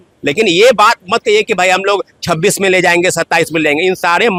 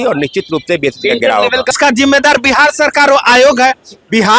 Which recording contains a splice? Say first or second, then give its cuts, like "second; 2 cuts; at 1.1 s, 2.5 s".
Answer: second; 1 cut; at 1.7 s